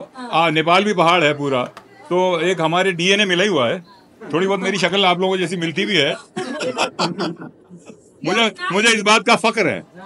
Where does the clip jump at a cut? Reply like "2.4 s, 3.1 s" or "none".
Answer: none